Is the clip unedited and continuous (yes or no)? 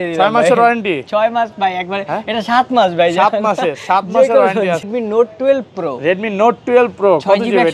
no